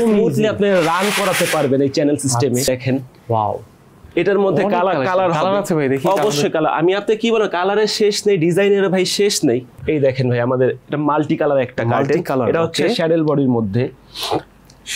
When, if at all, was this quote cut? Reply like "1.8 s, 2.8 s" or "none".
2.7 s, 9.8 s